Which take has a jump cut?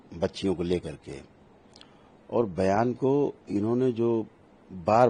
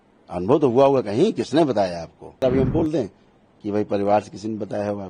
second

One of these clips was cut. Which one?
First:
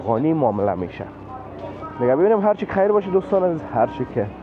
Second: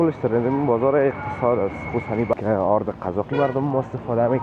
second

